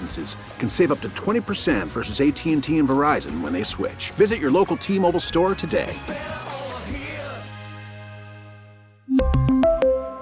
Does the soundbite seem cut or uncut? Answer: uncut